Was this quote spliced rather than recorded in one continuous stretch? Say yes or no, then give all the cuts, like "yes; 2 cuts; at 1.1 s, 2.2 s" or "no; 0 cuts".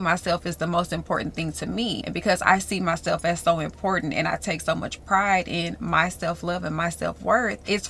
no; 0 cuts